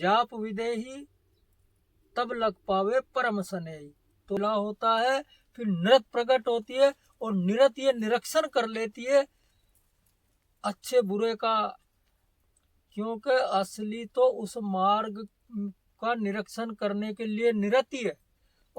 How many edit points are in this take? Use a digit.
1